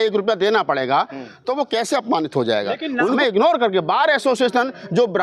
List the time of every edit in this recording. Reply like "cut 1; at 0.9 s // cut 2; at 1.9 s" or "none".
cut 1; at 3.2 s